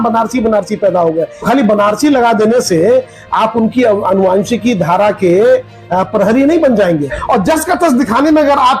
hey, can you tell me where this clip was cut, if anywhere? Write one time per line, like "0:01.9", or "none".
0:01.5
0:07.2